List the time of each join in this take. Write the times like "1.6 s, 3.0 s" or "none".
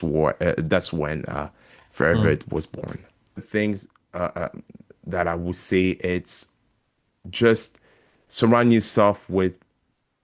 3.4 s